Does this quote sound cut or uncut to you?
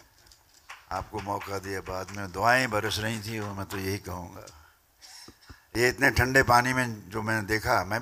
uncut